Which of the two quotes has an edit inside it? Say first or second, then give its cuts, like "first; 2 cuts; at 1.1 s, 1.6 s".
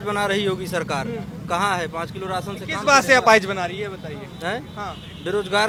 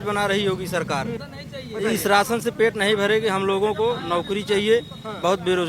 second; 1 cut; at 1.3 s